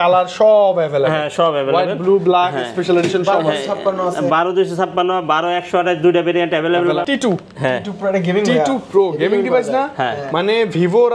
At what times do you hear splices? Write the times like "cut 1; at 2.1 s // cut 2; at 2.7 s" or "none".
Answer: cut 1; at 7.0 s